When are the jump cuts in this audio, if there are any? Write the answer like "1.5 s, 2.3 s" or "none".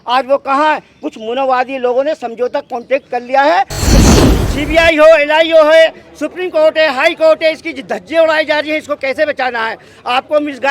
4.1 s

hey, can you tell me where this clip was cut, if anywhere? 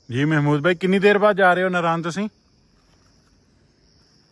none

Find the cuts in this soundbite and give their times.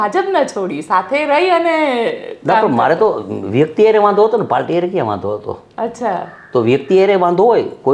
none

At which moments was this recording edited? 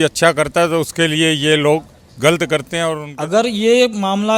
3.1 s

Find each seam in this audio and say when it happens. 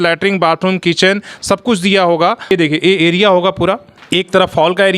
2.4 s, 3.9 s

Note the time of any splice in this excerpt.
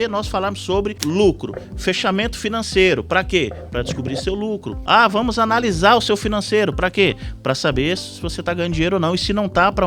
1.0 s, 4.7 s

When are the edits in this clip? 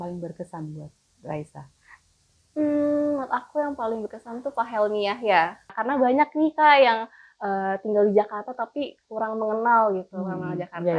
5.7 s

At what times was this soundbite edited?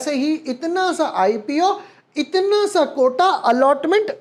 none

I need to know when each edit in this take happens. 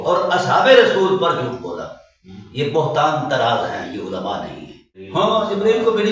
5.0 s

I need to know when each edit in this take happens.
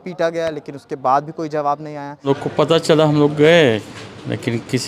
2.3 s

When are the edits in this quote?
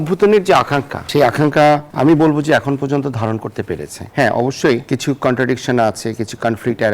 1.1 s, 1.9 s, 3.9 s, 4.8 s

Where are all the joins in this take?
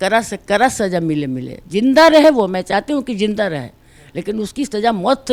none

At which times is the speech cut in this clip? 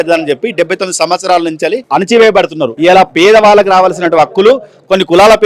1.8 s, 2.7 s

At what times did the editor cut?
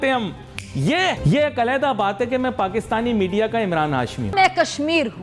1.2 s, 4.3 s

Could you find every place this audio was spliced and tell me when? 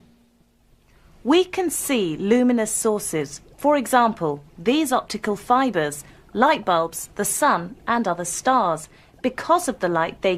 3.1 s

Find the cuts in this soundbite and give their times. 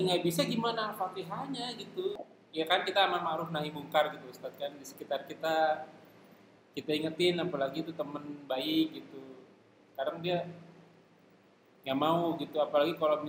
2.2 s

